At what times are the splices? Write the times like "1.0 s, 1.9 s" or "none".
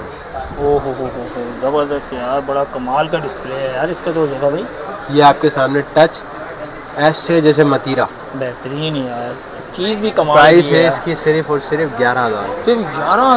none